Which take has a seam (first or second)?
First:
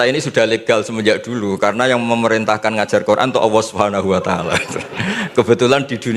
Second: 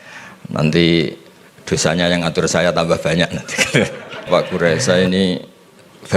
second